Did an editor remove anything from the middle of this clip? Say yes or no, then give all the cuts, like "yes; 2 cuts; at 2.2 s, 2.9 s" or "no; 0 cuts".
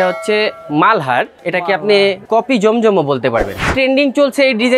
yes; 3 cuts; at 1.4 s, 2.2 s, 3.7 s